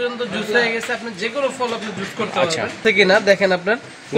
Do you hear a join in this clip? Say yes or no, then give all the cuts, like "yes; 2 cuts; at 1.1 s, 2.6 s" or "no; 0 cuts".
yes; 1 cut; at 2.8 s